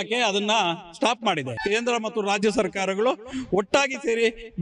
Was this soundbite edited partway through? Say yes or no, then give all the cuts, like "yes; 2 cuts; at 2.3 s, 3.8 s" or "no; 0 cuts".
yes; 1 cut; at 1.5 s